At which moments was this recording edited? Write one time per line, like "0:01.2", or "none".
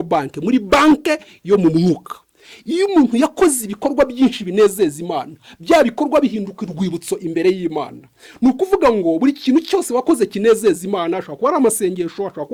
none